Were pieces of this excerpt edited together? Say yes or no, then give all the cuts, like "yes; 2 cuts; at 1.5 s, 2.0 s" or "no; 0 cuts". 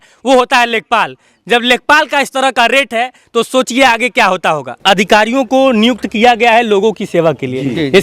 yes; 1 cut; at 4.8 s